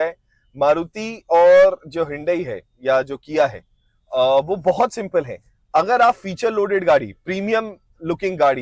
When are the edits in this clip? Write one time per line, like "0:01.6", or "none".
none